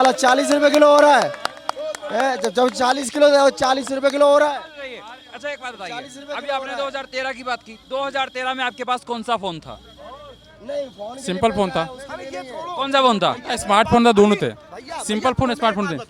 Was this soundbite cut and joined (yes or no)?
no